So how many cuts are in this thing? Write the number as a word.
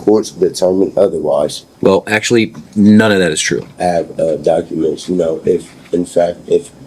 two